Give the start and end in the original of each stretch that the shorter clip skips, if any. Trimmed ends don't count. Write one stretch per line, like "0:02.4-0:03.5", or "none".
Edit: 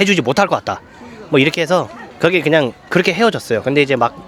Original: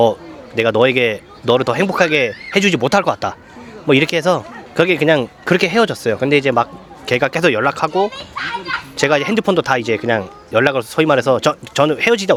none